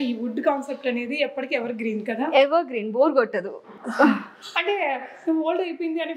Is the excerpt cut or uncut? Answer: uncut